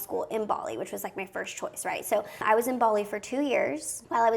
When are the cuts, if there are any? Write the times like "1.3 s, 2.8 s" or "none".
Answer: 2.2 s